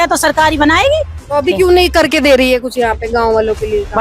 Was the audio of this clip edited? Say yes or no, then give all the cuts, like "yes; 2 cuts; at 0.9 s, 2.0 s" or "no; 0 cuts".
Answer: yes; 1 cut; at 1.2 s